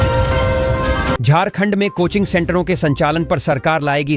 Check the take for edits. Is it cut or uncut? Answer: cut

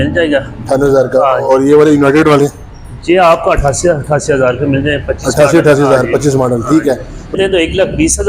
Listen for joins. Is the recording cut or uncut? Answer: cut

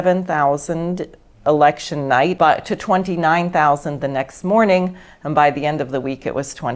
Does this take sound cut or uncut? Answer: cut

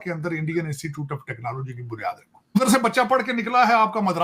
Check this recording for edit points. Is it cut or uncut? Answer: cut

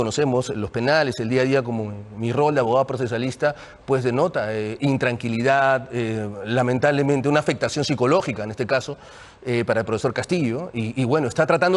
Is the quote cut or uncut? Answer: uncut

